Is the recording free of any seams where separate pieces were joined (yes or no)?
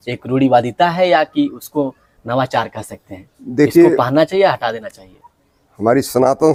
yes